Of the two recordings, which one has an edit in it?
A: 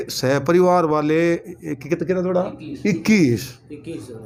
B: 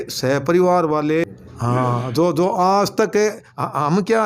B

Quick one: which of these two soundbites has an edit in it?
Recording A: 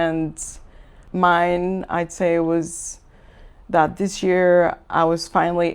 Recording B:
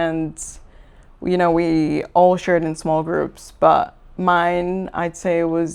A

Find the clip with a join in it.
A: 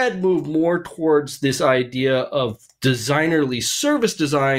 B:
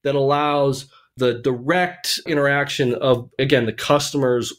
B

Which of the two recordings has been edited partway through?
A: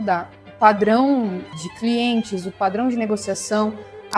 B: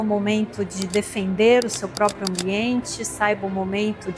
A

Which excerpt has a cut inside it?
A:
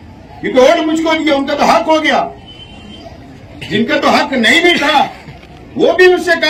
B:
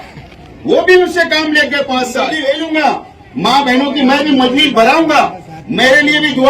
B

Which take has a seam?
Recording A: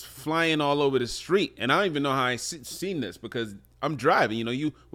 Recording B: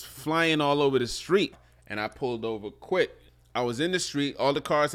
B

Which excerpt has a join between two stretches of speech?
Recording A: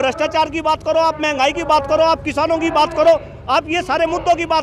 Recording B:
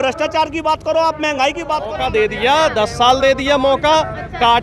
B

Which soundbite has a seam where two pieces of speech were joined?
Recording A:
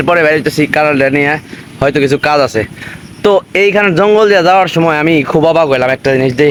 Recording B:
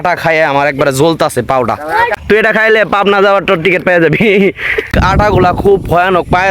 B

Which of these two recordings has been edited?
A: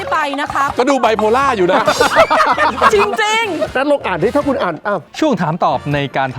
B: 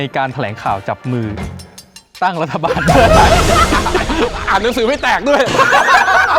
A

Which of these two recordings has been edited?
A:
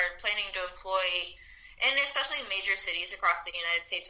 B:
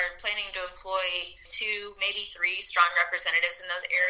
B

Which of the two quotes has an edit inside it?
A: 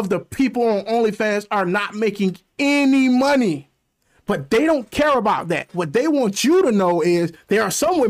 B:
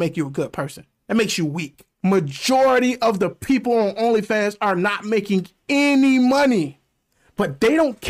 B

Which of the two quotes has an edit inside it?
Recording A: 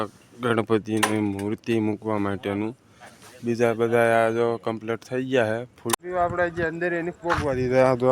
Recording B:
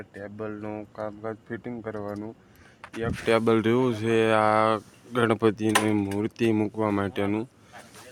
A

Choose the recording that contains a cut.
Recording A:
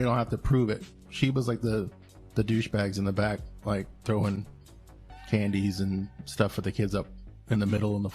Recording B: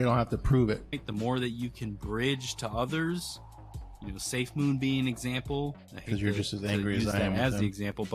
B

